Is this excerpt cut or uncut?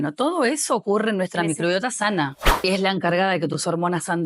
cut